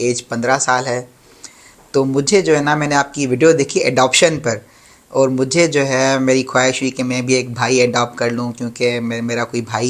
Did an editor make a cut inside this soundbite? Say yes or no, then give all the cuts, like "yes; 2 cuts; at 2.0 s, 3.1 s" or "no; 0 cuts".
no; 0 cuts